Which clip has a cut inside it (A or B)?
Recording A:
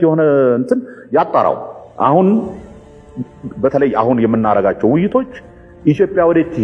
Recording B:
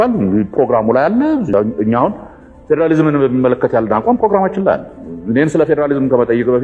B